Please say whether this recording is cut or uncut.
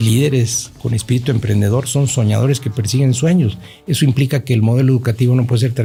uncut